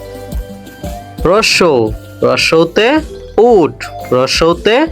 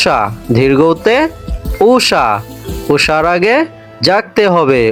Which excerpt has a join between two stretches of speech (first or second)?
first